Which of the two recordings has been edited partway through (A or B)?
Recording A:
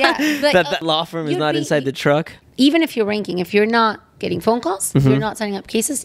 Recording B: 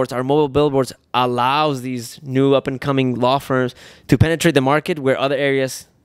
A